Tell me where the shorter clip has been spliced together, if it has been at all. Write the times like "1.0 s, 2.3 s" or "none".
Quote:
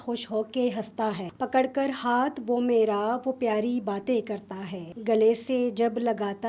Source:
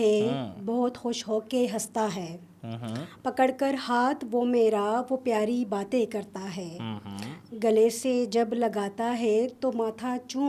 1.3 s, 4.9 s

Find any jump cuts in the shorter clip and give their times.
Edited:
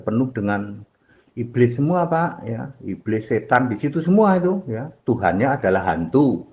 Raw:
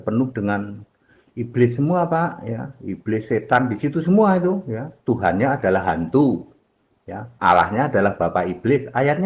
none

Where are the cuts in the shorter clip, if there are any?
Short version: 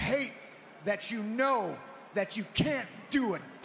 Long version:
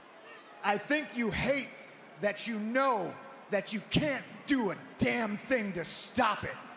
none

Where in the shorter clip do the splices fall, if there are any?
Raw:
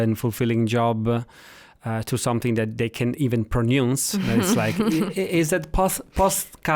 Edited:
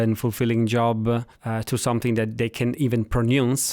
1.4 s

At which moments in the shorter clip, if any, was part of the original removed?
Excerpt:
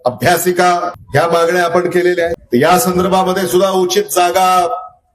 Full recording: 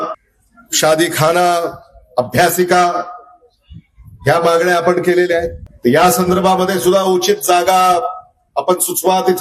1.0 s, 2.4 s

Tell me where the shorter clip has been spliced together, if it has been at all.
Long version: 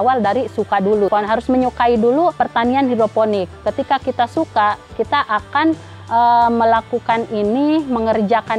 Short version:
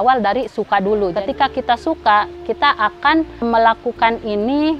1.1 s, 3.5 s

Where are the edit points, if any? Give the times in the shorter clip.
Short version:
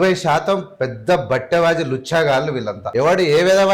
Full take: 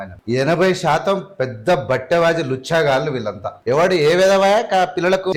2.8 s

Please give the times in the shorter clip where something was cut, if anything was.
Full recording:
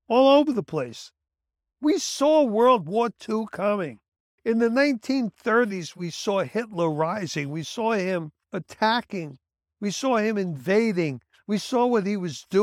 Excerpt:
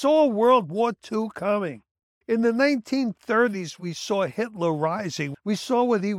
5.3 s

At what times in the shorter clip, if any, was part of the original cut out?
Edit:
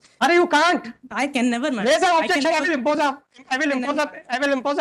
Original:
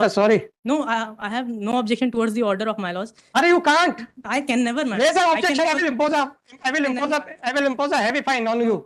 none

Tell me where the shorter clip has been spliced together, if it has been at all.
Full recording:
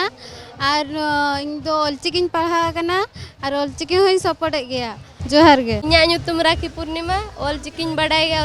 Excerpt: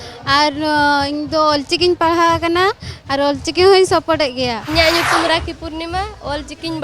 4.6 s

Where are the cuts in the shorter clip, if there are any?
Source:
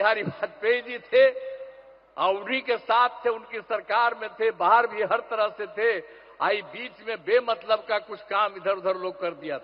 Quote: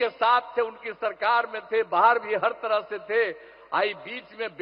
none

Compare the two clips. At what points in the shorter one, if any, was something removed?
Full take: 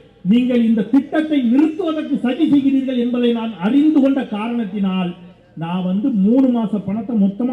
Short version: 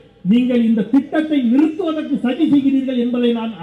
none

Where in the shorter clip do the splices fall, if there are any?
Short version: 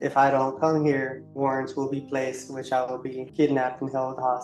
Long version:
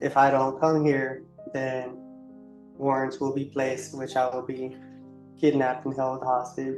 1.2 s, 3.2 s

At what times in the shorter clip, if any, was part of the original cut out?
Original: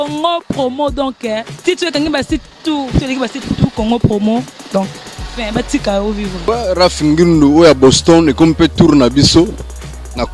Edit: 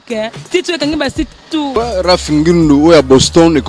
1.7 s

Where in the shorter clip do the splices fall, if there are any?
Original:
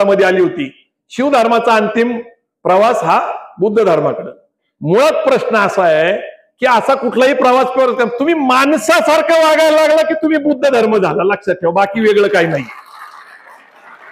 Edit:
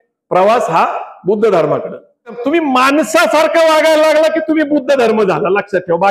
2.4 s

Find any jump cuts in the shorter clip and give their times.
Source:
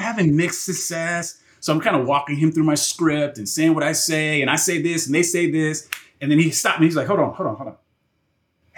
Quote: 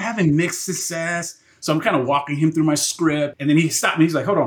3.4 s

